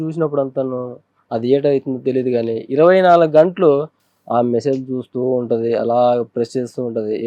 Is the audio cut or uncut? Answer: uncut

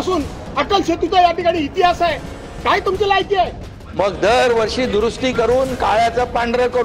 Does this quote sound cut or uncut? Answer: cut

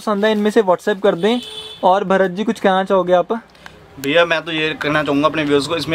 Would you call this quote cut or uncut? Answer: uncut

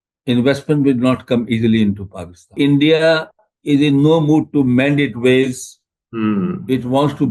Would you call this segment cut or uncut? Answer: cut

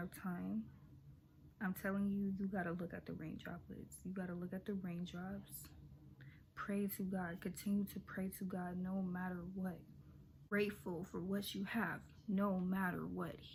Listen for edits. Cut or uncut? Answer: uncut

